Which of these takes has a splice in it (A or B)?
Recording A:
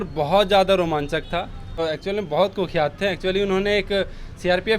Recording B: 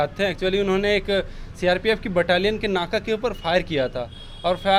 A